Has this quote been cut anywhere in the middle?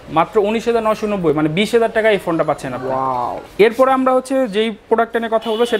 no; 0 cuts

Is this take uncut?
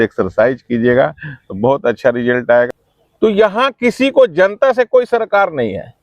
no; 1 cut; at 2.7 s

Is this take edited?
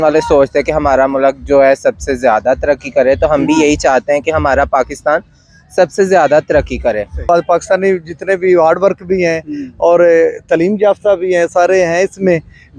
yes; 1 cut; at 7.2 s

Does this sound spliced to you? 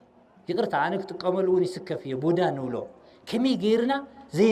no; 0 cuts

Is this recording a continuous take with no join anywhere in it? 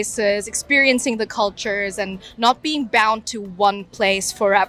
yes; 0 cuts

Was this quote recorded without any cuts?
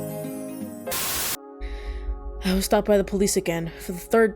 no; 1 cut; at 0.9 s

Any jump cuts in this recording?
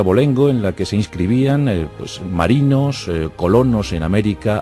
yes; 1 cut; at 2.7 s

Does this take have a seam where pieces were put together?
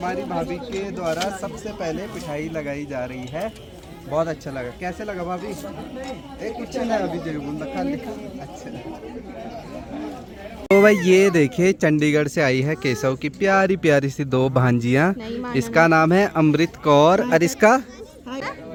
no; 0 cuts

